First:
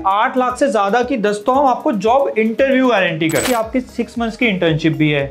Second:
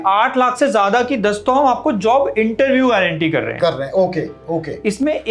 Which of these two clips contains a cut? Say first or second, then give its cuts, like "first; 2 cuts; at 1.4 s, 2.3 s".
first; 1 cut; at 3.4 s